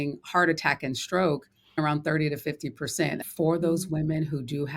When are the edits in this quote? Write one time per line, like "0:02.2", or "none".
0:01.8
0:03.2